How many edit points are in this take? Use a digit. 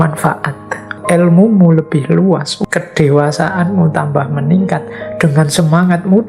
2